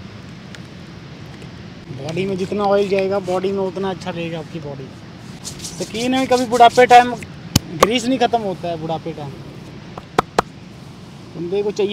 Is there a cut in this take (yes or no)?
yes